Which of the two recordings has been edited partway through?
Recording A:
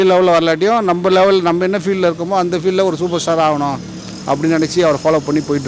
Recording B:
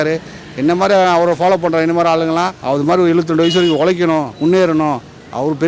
B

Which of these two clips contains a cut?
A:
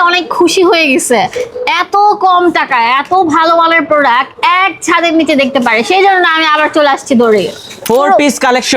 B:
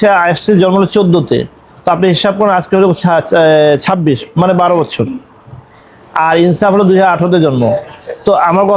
A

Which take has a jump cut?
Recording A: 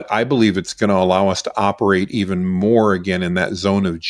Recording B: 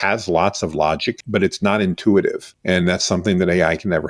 B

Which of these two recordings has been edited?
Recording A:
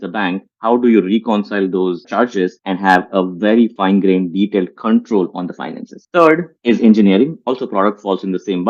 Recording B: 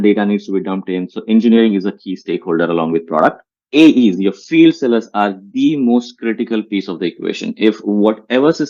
A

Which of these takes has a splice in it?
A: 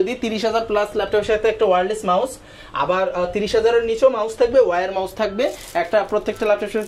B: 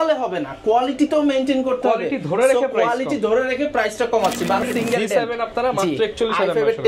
B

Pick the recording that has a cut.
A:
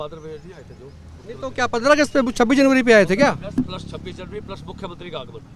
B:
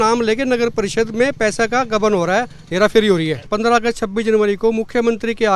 B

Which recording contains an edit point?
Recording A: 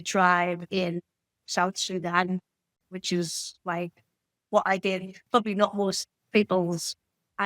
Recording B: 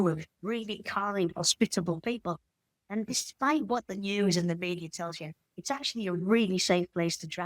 A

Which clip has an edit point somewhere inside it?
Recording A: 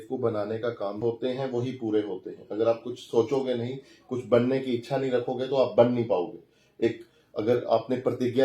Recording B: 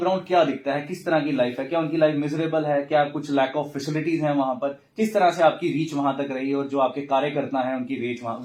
A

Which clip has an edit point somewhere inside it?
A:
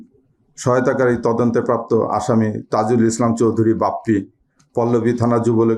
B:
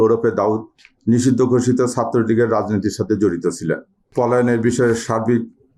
B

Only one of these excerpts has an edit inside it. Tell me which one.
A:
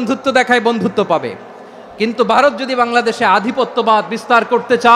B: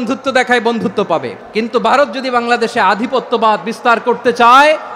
B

